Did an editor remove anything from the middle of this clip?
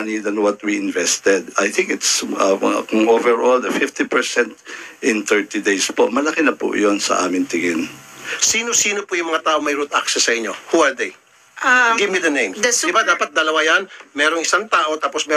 yes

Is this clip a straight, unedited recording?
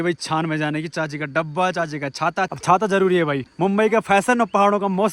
no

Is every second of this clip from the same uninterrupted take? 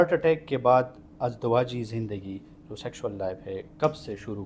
yes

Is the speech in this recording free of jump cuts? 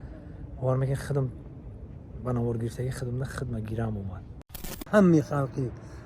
no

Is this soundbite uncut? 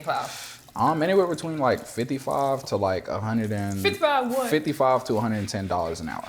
yes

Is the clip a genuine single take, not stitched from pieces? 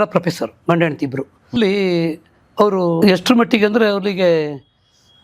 no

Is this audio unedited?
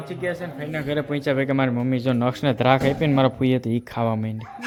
yes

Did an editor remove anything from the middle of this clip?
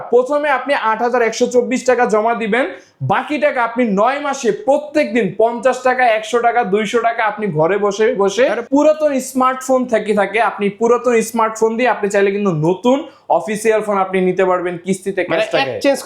yes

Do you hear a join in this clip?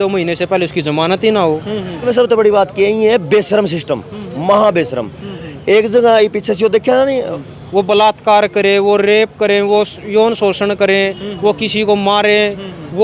yes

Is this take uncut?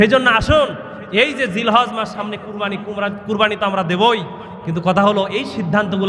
yes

